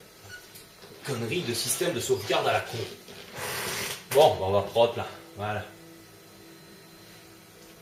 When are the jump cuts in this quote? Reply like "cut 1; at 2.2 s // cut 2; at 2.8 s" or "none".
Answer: none

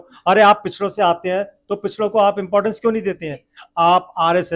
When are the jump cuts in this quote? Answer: none

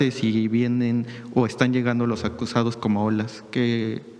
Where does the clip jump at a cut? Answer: none

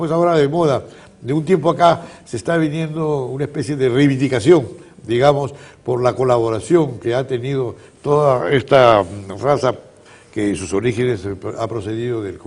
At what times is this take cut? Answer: cut 1; at 7.5 s

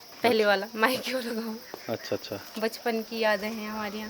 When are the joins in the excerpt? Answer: none

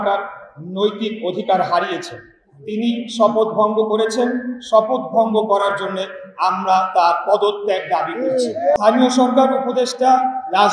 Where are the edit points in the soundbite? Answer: cut 1; at 8.8 s

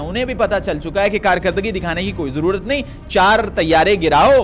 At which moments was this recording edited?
none

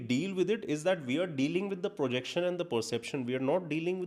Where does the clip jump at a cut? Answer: none

